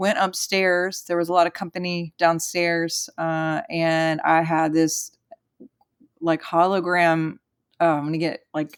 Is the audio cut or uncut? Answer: uncut